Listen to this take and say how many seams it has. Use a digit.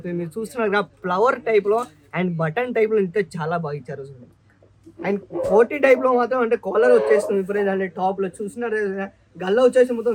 0